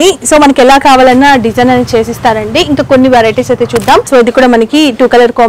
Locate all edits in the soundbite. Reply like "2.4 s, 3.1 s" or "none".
4.1 s